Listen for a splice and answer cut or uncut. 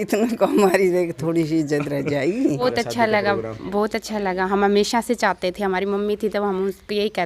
cut